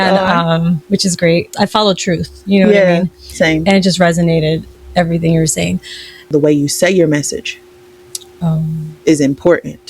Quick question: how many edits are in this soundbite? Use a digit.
2